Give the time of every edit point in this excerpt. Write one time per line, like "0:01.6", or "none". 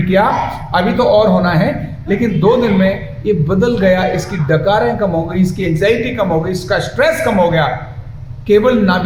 none